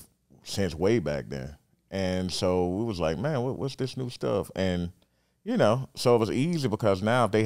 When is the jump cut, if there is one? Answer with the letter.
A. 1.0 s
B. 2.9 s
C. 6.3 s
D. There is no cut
D